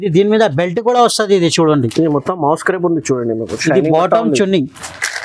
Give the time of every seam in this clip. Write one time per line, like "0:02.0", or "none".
none